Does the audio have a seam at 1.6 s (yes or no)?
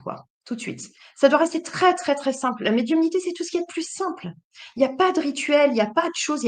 no